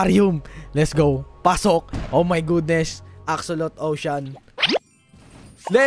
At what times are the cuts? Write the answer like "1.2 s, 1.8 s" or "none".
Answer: none